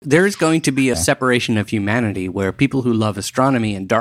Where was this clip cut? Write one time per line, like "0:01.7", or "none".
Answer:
0:01.0